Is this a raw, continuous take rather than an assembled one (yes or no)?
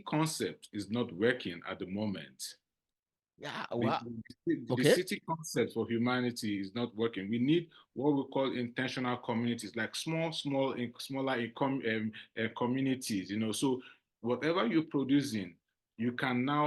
yes